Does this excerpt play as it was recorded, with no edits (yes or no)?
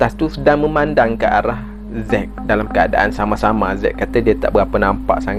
yes